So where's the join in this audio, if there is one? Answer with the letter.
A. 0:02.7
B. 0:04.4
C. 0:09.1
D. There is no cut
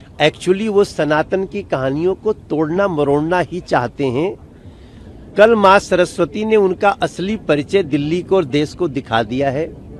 D